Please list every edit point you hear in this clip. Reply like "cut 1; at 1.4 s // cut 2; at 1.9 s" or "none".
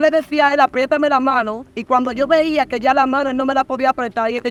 none

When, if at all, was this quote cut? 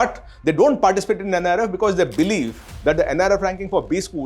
cut 1; at 2.6 s

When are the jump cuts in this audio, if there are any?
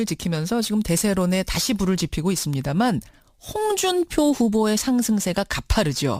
none

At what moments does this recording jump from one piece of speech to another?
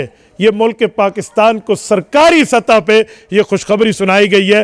none

